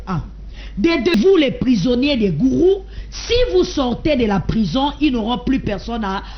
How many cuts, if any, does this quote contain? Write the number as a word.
one